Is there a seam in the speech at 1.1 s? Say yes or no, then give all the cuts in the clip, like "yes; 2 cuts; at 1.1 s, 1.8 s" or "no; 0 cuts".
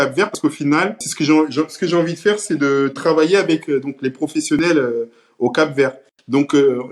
yes; 1 cut; at 1.1 s